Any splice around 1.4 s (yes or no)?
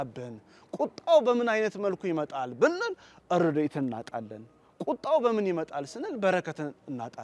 no